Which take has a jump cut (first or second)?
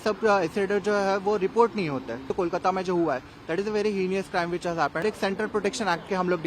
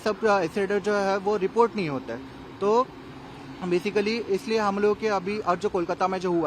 first